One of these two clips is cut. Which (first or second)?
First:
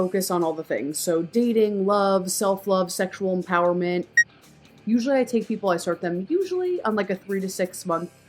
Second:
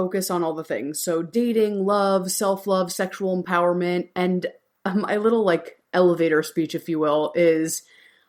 first